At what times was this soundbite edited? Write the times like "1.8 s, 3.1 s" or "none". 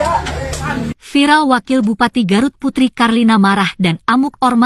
none